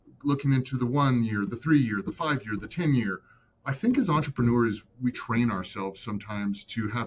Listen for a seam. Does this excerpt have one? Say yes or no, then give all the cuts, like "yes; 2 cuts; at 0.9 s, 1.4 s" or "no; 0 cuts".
no; 0 cuts